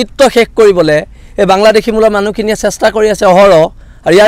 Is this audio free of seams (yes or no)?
yes